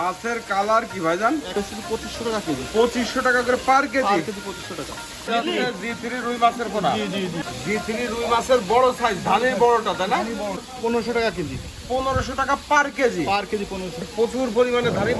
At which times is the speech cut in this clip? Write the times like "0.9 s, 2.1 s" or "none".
1.5 s, 5.3 s, 7.5 s, 10.7 s, 14.1 s

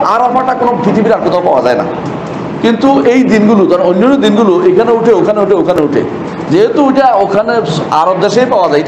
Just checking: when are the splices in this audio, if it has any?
none

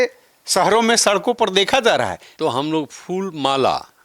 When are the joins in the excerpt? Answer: 2.2 s

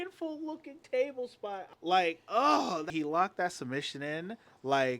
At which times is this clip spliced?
1.7 s, 2.9 s

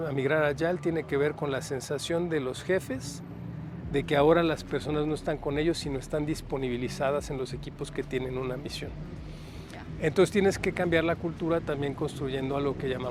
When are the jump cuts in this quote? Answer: none

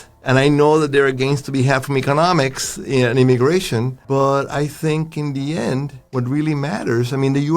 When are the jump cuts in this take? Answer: 4.0 s, 6.0 s

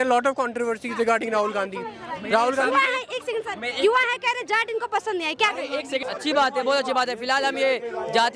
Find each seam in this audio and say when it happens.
6.0 s

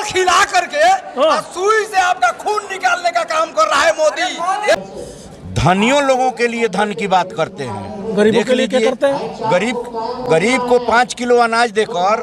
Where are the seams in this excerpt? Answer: 4.8 s

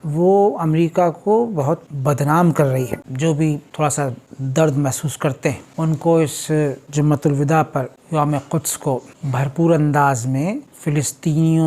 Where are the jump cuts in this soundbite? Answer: 3.0 s

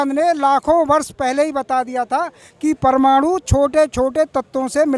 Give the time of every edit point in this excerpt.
none

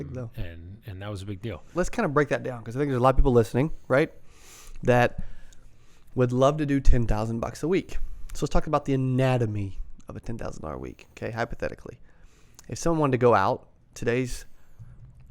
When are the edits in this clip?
1.7 s

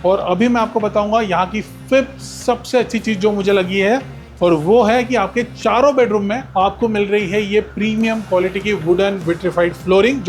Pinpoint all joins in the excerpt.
none

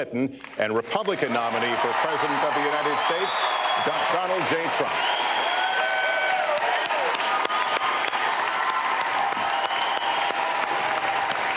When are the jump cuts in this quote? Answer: none

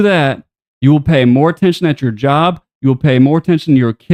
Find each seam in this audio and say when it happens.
none

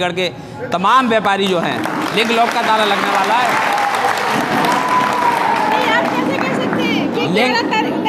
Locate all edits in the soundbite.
none

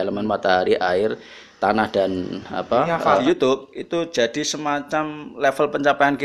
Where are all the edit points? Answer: 3.2 s

